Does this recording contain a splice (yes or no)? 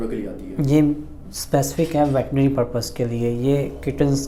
no